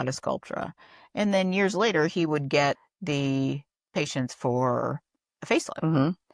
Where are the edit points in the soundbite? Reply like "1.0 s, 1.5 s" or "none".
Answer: 2.9 s